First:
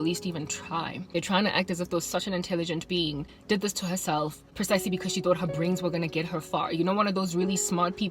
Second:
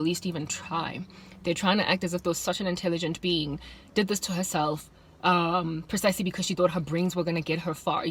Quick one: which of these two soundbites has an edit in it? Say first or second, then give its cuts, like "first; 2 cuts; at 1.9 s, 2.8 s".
first; 3 cuts; at 1.0 s, 3.3 s, 4.5 s